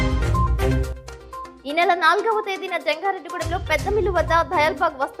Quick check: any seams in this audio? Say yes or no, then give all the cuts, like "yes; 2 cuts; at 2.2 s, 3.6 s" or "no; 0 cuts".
yes; 1 cut; at 1.5 s